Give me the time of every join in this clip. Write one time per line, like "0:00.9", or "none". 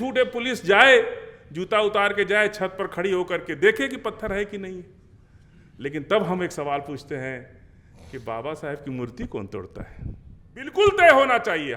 0:10.7